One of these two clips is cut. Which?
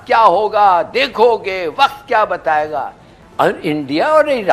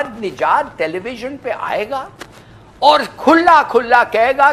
first; 1 cut; at 3.2 s

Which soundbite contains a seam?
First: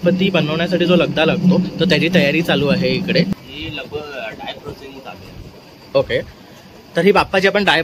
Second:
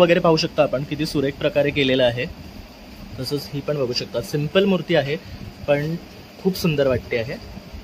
first; 1 cut; at 3.3 s

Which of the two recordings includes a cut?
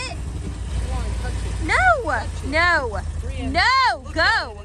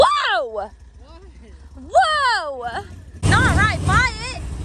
second; 1 cut; at 3.2 s

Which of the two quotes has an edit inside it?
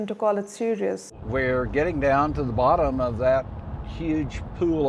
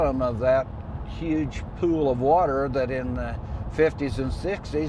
first; 1 cut; at 1.1 s

